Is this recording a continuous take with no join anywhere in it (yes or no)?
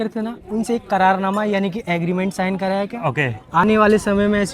yes